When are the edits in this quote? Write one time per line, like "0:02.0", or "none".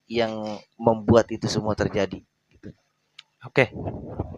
none